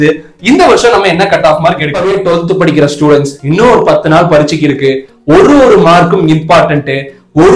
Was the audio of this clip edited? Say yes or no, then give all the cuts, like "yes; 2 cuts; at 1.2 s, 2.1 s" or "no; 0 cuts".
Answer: yes; 1 cut; at 1.9 s